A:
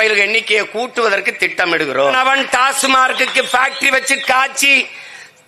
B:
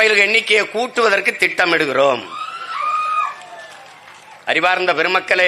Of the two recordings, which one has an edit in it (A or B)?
A